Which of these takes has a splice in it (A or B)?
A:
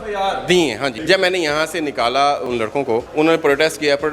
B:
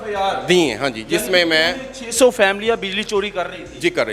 A